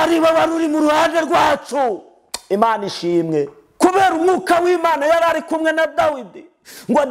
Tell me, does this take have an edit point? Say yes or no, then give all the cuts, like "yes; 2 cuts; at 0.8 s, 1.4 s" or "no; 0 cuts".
yes; 1 cut; at 3.6 s